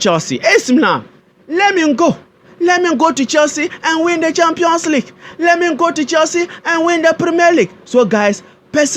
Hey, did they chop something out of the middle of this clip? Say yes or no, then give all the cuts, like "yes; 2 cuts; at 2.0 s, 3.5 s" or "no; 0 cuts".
no; 0 cuts